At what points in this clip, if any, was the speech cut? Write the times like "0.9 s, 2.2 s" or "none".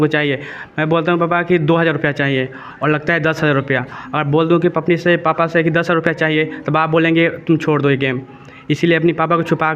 none